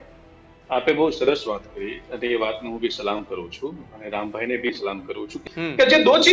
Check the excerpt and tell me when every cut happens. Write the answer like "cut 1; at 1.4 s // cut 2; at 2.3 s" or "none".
cut 1; at 5.3 s